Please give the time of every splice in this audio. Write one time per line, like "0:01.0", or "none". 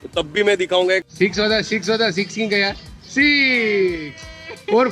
0:01.0